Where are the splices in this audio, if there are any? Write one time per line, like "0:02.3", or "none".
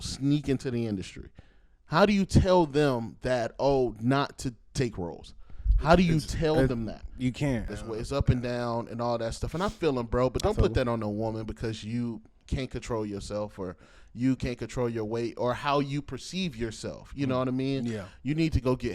0:07.8